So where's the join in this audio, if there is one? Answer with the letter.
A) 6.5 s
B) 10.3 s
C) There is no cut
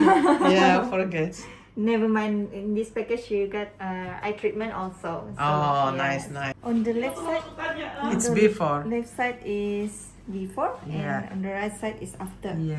A